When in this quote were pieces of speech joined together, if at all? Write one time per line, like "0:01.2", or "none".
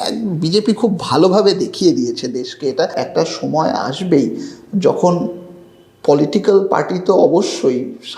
0:03.0